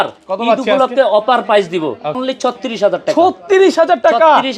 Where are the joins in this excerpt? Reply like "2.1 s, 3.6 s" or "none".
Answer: 2.2 s